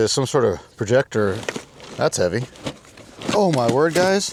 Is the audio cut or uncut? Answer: uncut